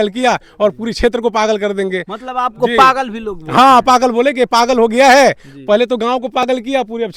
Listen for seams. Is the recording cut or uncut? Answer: uncut